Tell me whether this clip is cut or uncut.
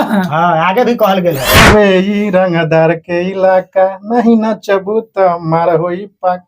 cut